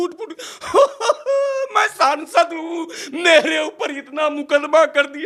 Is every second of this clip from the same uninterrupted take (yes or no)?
yes